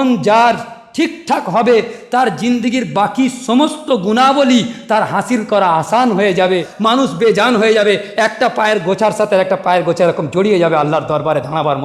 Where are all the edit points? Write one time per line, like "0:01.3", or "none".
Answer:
0:06.7